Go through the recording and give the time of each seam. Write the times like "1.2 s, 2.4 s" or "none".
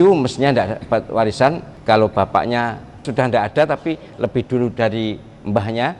1.7 s, 3.1 s